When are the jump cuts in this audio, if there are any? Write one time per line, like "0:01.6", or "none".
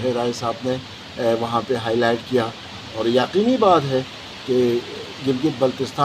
none

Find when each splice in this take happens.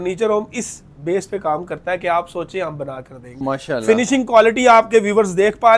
0:03.4

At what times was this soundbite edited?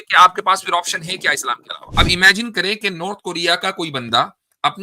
0:01.7

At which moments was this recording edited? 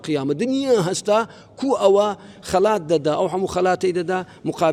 none

